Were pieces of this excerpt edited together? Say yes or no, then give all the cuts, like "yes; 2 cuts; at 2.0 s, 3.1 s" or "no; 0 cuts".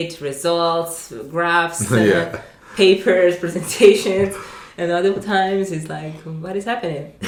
no; 0 cuts